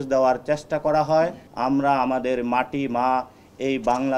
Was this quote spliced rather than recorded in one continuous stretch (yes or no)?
yes